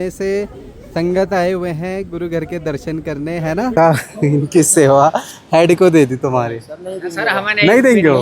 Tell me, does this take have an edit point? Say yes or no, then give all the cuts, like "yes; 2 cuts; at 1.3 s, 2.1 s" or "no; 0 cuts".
yes; 1 cut; at 3.7 s